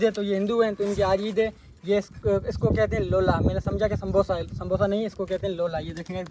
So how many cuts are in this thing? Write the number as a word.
zero